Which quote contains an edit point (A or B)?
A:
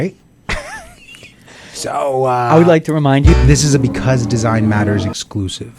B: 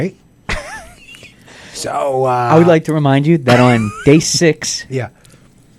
A